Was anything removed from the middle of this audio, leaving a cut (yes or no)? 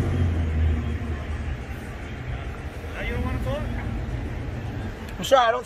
yes